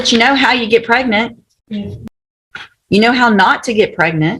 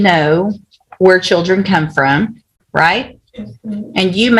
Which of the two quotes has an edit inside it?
first; 1 cut; at 2.0 s

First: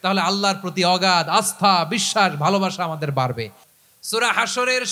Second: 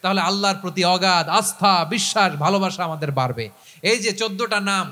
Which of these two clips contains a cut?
first; 1 cut; at 3.6 s

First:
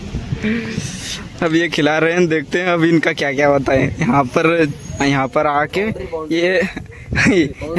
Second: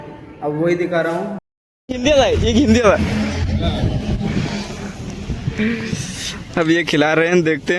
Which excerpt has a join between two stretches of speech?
second; 1 cut; at 1.4 s

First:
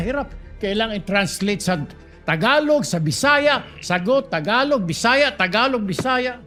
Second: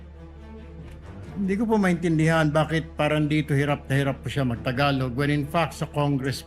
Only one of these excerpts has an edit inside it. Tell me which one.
second; 1 cut; at 1.1 s

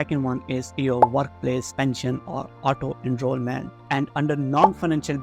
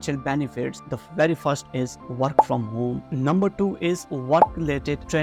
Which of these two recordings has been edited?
first; 1 cut; at 3.8 s

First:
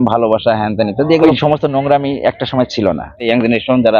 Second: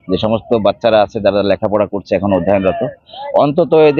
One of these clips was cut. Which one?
first; 2 cuts; at 1.2 s, 3.1 s

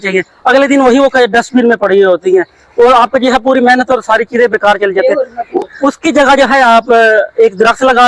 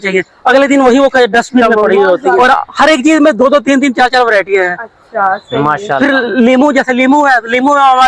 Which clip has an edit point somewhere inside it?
second; 1 cut; at 2.3 s

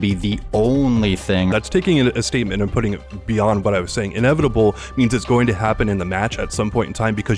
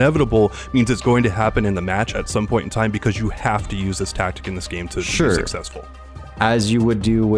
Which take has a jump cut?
first; 1 cut; at 1.5 s

